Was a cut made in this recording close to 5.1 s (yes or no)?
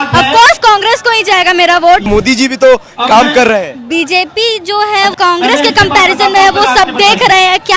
yes